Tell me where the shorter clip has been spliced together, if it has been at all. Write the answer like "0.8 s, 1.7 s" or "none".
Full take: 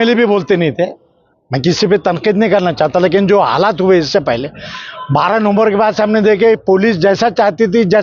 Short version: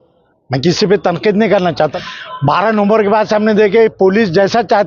1.9 s